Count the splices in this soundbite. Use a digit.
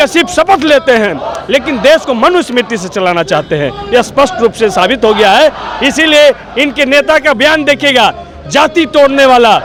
0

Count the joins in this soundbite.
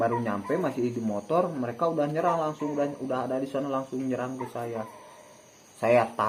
0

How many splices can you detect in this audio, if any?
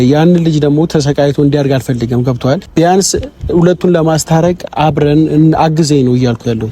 1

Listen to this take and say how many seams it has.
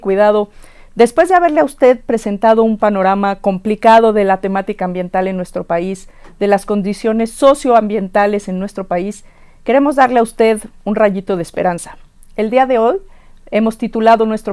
1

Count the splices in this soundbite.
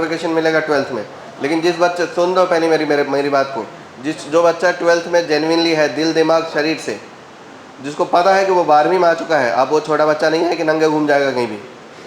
0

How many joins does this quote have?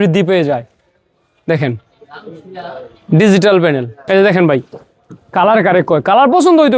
1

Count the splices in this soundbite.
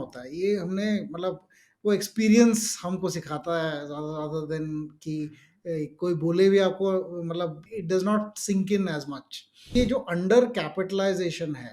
1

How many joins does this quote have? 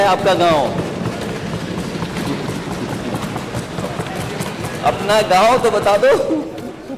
0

